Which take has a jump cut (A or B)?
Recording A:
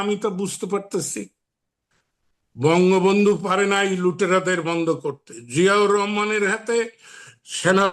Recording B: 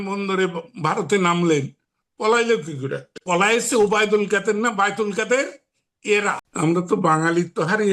B